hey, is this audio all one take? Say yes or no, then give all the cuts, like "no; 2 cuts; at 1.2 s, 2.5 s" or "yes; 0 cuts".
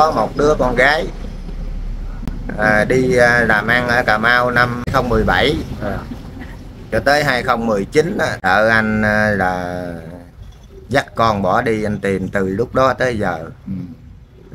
no; 2 cuts; at 4.9 s, 8.4 s